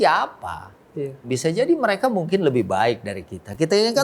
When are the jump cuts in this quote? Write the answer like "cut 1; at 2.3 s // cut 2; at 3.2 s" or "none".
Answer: cut 1; at 1.3 s